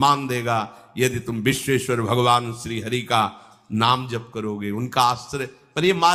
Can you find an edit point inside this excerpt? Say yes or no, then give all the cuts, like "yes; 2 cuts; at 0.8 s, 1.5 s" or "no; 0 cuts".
no; 0 cuts